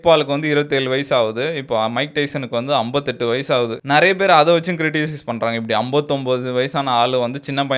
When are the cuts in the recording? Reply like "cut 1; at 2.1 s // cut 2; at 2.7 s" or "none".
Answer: none